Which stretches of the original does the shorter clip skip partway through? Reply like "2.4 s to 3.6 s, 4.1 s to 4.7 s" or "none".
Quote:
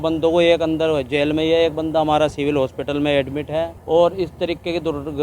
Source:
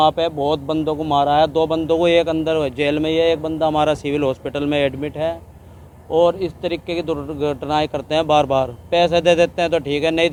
5.4 s to 6.0 s